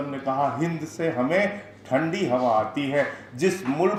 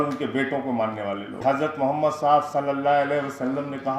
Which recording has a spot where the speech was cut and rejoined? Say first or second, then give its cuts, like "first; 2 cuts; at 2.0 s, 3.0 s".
second; 1 cut; at 1.3 s